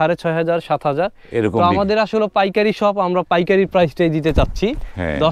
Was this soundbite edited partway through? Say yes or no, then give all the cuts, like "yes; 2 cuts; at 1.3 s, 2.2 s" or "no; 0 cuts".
no; 0 cuts